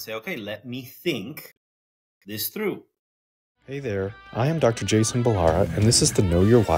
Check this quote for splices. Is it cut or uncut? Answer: cut